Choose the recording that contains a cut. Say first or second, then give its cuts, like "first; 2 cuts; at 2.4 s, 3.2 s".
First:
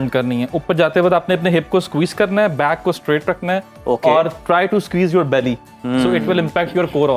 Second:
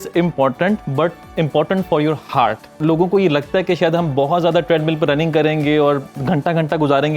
second; 1 cut; at 2.8 s